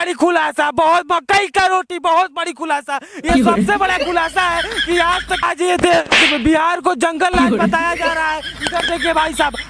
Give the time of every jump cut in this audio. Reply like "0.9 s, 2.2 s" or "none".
5.4 s